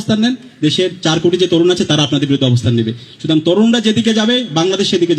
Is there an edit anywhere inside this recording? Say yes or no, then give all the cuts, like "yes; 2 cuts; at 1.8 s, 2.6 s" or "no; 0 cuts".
no; 0 cuts